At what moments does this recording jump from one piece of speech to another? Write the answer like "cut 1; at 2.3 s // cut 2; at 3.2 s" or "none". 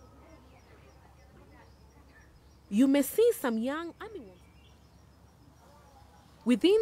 cut 1; at 4.0 s